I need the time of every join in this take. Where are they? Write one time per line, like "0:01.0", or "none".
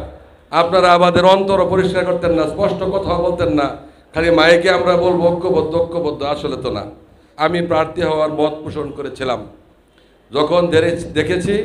0:07.3